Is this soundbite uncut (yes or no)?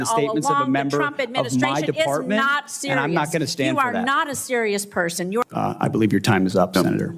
no